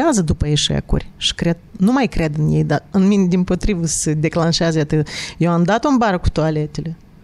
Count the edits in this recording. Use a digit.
0